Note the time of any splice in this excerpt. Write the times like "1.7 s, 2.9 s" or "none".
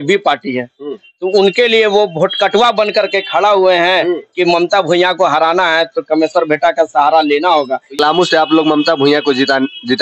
7.9 s